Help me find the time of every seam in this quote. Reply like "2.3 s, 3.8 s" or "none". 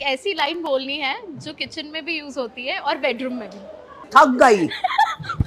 3.9 s